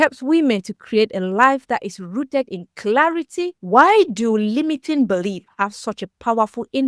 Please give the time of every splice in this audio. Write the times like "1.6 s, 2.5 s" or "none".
3.6 s